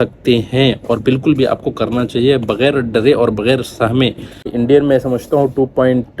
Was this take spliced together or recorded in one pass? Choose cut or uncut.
cut